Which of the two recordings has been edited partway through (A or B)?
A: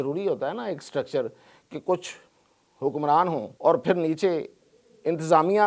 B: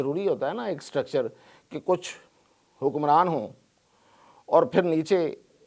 A